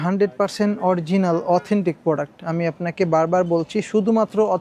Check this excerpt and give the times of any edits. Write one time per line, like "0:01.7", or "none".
none

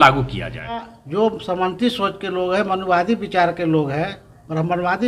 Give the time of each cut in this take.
0:01.0

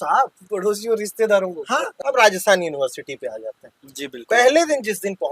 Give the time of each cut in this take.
0:01.9

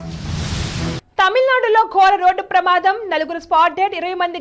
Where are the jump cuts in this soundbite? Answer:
none

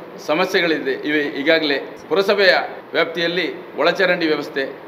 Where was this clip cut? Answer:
0:01.9
0:02.8

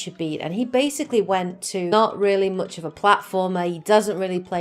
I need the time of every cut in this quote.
none

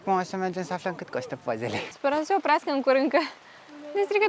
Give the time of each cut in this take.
0:01.9

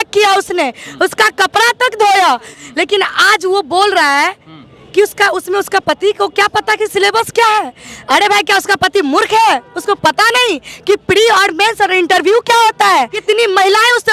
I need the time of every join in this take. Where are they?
0:02.5
0:13.2

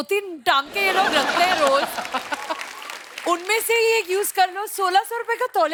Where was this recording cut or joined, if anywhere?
none

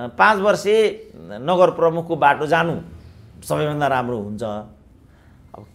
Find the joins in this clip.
none

